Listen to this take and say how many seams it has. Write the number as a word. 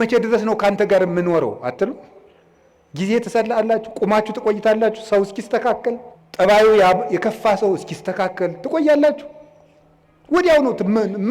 one